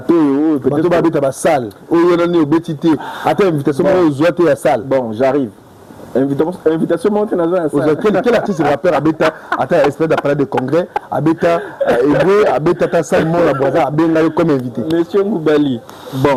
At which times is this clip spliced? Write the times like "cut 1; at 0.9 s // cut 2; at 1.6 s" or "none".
none